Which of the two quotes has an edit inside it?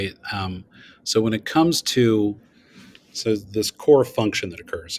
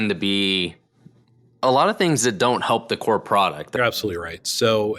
second; 1 cut; at 3.6 s

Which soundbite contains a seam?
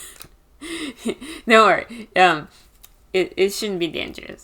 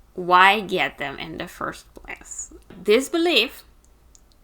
second; 1 cut; at 2.8 s

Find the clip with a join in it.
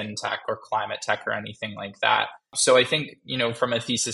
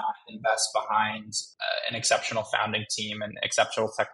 first; 1 cut; at 2.5 s

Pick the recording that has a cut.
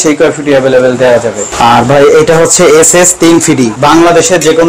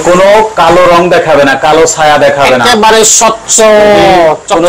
first; 2 cuts; at 1.5 s, 3.7 s

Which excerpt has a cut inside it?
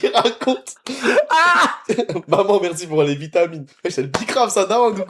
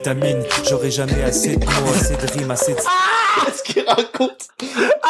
second; 1 cut; at 2.8 s

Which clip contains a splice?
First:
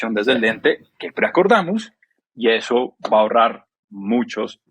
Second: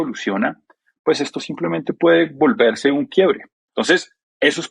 second; 1 cut; at 3.6 s

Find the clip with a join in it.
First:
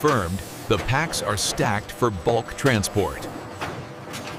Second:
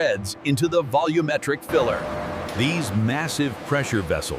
second; 1 cut; at 2.0 s

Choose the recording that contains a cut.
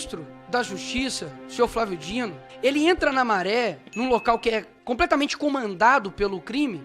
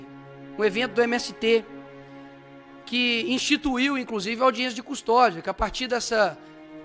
first; 2 cuts; at 2.4 s, 4.7 s

